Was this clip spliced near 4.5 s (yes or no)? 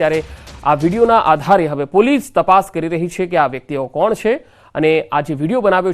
no